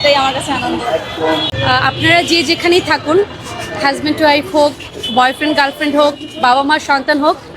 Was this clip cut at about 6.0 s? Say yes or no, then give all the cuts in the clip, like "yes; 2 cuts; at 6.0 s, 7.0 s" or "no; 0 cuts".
no; 1 cut; at 1.5 s